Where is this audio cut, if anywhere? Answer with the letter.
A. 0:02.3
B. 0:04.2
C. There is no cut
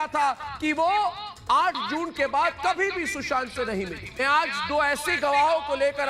B